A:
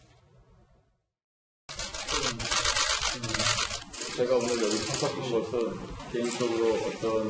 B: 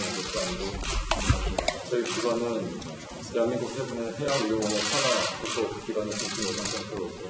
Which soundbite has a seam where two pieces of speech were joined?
A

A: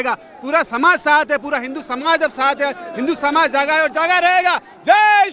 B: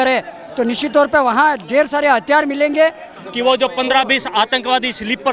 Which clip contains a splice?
B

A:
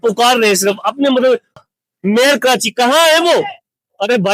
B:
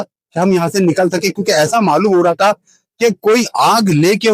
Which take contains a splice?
A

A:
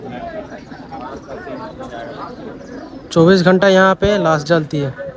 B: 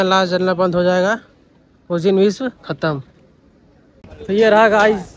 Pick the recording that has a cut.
B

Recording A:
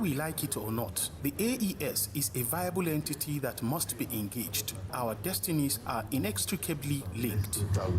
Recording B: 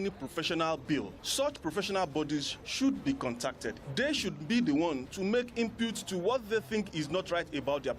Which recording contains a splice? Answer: A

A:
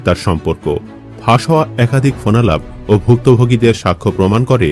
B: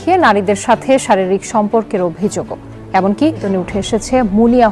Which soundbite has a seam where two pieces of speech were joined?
B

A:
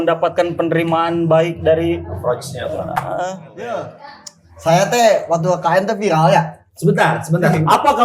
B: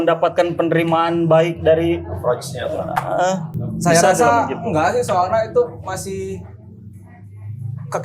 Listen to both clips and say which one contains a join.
A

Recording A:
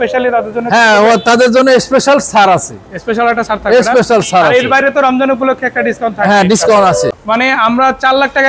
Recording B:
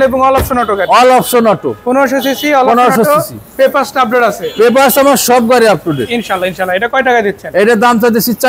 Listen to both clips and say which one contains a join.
A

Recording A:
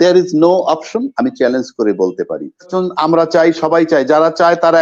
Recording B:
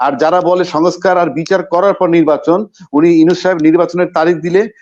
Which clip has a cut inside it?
A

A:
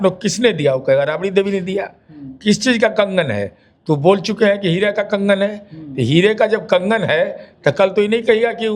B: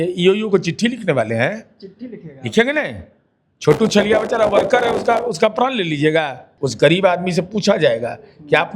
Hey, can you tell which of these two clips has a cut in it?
B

